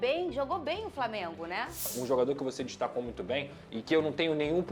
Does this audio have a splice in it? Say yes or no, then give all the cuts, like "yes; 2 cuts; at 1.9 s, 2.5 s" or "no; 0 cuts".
yes; 1 cut; at 1.8 s